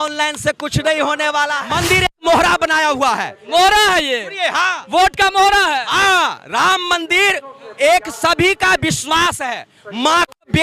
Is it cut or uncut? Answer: cut